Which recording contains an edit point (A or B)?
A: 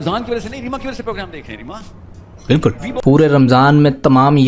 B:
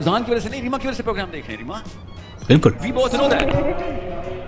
A